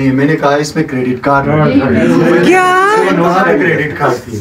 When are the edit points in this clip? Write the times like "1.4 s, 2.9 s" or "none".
none

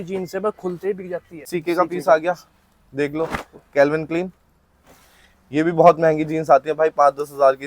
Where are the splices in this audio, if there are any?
1.5 s

